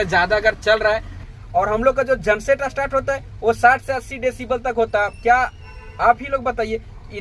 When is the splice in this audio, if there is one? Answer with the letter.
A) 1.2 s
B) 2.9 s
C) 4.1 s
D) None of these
A